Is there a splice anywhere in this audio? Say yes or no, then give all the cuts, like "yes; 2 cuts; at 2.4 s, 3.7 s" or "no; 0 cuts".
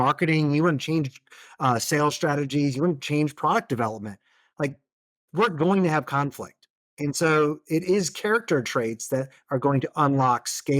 no; 0 cuts